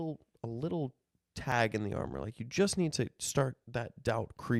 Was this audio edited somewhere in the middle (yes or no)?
no